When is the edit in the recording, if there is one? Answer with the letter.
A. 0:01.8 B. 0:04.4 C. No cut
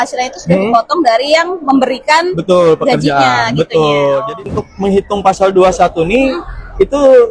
B